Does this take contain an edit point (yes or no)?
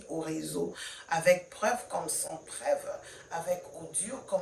no